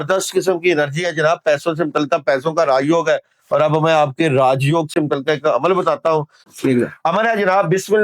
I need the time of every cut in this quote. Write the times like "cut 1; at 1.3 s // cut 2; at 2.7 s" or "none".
none